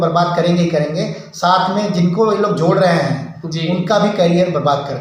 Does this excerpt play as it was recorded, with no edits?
yes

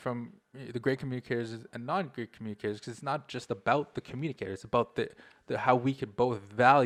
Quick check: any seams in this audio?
no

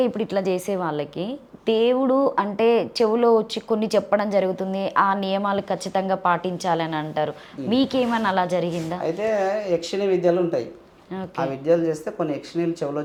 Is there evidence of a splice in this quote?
no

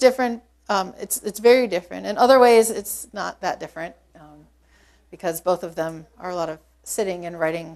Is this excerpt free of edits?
yes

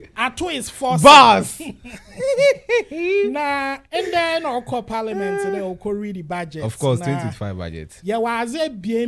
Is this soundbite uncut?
yes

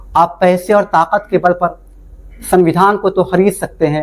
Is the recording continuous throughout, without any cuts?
yes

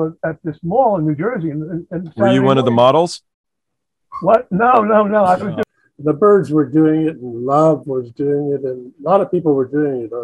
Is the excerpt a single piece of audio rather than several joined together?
no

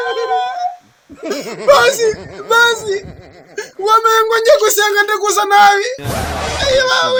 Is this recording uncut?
yes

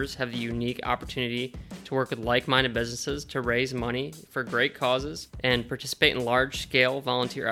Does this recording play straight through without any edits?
no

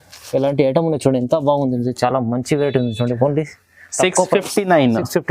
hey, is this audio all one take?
yes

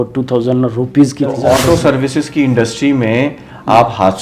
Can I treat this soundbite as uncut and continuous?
no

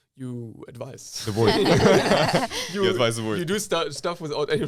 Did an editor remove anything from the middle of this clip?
no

